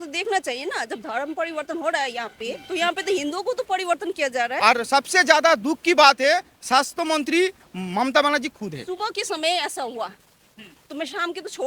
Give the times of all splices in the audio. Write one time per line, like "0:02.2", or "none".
0:02.6
0:04.6
0:08.8